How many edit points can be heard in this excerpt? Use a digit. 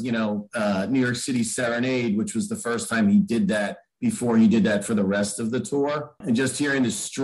1